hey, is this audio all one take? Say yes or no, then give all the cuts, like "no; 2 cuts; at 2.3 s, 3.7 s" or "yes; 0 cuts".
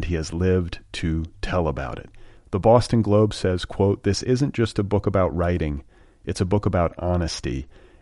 yes; 0 cuts